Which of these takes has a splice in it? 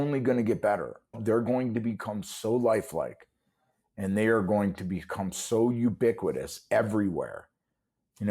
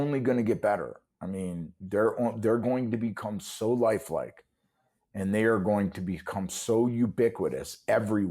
first; 1 cut; at 1.2 s

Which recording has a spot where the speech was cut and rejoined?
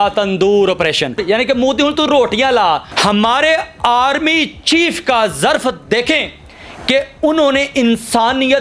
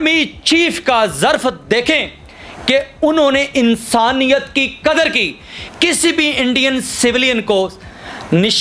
first; 2 cuts; at 1.2 s, 2.9 s

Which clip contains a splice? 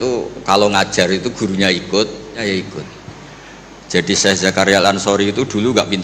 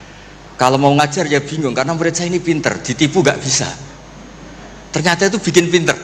first; 1 cut; at 2.4 s

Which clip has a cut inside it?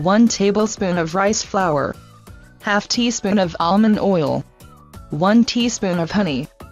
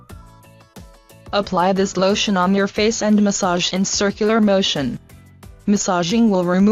first; 1 cut; at 0.9 s

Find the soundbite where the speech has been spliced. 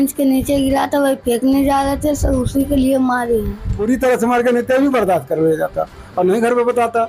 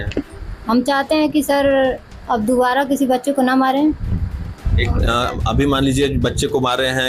first; 1 cut; at 3.8 s

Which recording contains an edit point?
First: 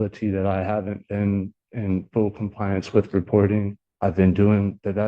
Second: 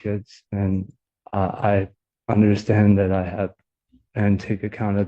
first; 1 cut; at 3.8 s

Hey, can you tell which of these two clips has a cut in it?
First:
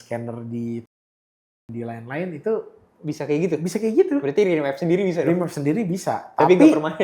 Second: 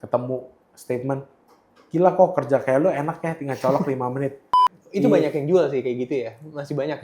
second; 1 cut; at 4.5 s

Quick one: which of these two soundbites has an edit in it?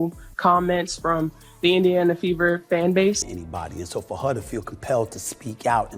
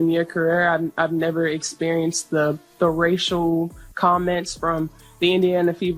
first; 1 cut; at 3.3 s

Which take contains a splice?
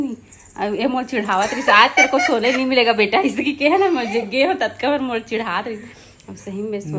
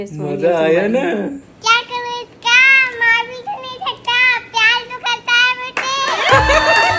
second; 1 cut; at 1.5 s

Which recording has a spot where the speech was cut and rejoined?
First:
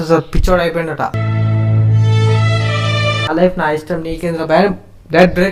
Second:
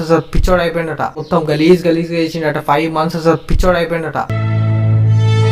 first; 2 cuts; at 1.1 s, 3.3 s

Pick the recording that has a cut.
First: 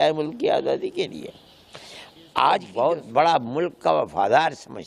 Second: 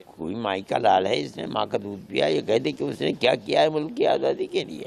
first; 1 cut; at 2.7 s

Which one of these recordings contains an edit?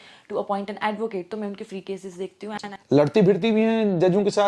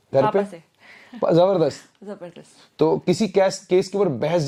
first; 1 cut; at 2.6 s

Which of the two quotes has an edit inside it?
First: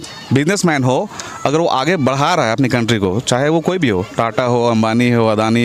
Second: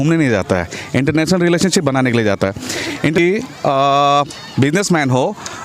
second; 1 cut; at 3.2 s

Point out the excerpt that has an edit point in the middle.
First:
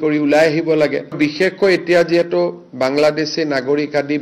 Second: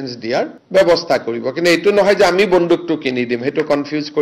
first; 1 cut; at 1.0 s

